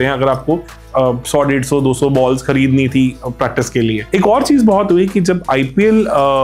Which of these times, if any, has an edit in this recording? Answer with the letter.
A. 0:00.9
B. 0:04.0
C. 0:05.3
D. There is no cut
B